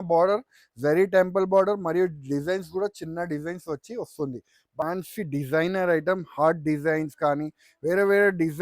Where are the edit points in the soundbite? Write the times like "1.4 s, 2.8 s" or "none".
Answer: 4.8 s